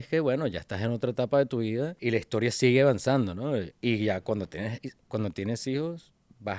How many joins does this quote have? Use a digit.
2